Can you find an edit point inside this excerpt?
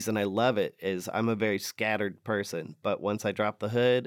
no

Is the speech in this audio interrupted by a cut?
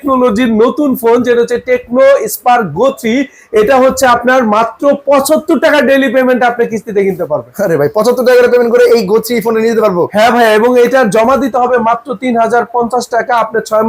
no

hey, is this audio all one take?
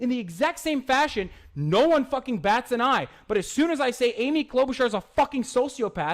no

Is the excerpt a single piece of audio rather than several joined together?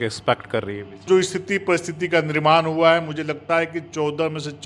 no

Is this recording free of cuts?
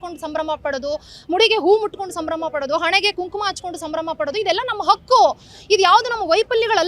yes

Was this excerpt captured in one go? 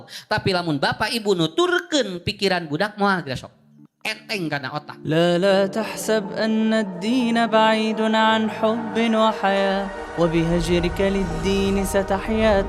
no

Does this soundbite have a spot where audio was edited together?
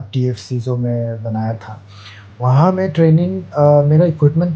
no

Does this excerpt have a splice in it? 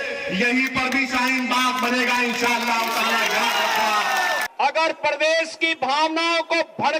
yes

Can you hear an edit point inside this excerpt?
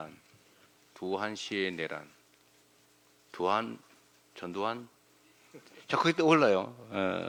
no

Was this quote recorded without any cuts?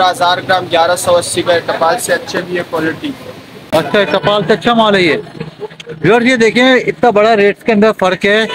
no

